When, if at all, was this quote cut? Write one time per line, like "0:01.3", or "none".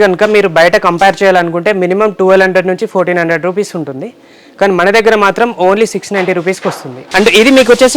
0:06.9